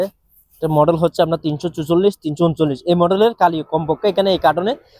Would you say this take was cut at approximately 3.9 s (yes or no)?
no